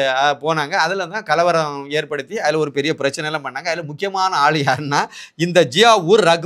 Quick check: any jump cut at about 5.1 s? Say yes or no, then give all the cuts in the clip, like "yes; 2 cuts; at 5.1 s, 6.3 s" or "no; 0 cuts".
no; 0 cuts